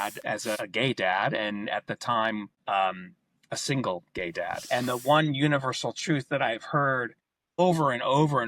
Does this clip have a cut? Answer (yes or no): yes